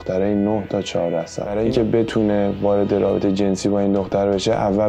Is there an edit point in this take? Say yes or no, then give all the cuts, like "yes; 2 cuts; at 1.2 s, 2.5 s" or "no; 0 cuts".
yes; 1 cut; at 1.4 s